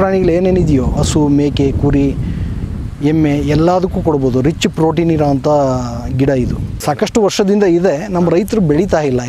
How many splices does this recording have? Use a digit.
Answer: 2